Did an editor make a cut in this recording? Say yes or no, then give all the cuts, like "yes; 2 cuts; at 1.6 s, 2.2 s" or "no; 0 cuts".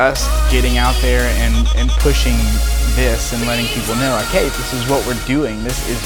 no; 0 cuts